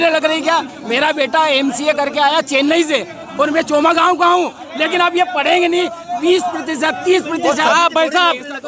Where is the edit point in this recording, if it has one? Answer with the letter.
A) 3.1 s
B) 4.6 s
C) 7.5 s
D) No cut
D